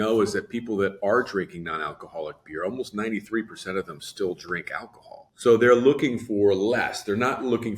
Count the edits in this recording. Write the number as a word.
one